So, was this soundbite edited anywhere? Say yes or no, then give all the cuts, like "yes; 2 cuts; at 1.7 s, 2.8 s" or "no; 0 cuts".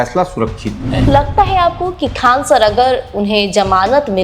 yes; 1 cut; at 1.1 s